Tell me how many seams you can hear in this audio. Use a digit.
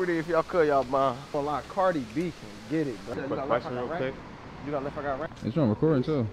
2